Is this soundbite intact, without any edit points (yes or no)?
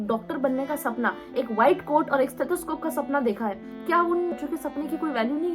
no